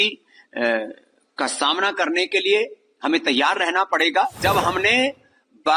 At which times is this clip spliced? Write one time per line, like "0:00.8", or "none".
0:04.4